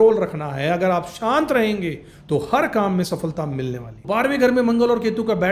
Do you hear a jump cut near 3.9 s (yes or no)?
yes